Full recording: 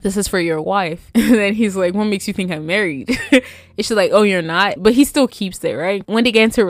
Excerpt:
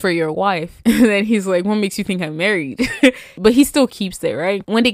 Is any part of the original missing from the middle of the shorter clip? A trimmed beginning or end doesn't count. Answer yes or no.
yes